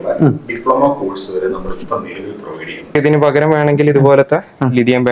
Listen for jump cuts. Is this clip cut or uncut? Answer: cut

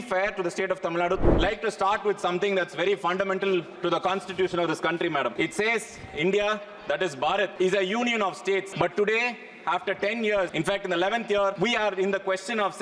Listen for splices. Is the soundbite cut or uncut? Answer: cut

